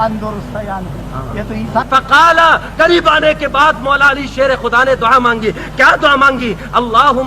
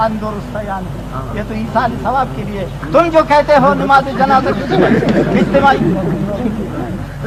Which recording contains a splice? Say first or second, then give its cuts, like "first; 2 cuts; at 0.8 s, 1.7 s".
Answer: first; 1 cut; at 1.8 s